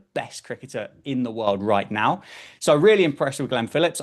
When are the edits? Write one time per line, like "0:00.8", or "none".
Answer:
none